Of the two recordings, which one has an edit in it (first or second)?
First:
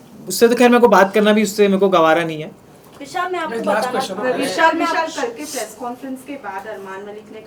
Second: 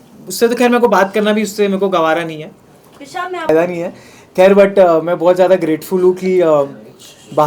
second